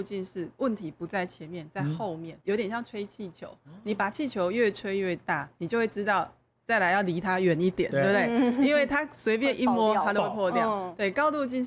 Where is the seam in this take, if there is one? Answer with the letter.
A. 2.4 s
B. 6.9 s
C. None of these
A